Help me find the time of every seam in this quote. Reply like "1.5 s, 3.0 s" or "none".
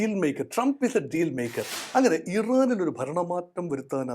1.7 s